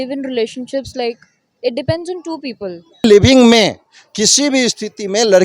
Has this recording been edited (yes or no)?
yes